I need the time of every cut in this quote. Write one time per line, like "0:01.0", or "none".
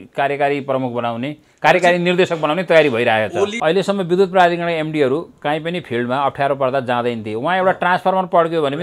0:03.6